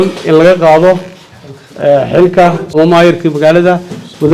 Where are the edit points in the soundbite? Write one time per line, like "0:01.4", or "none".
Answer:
0:02.7